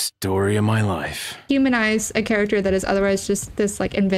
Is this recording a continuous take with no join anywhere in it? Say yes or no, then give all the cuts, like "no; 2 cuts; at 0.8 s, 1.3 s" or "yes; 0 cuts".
no; 1 cut; at 1.4 s